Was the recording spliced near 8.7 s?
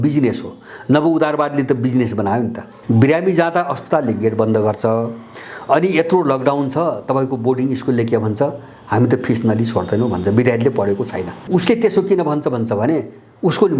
no; 2 cuts; at 2.7 s, 11.4 s

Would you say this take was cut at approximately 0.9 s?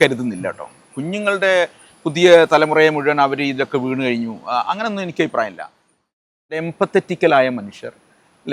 no; 1 cut; at 6.6 s

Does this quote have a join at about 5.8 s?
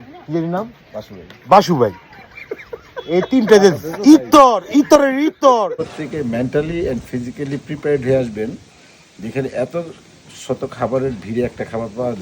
yes; 1 cut; at 5.8 s

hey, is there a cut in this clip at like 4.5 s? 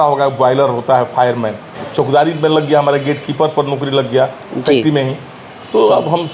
no; 1 cut; at 1.8 s

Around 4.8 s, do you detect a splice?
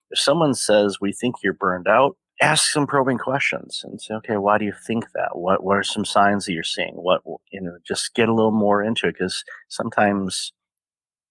no; 1 cut; at 2.3 s

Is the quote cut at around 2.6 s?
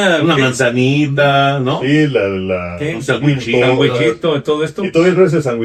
no; 0 cuts

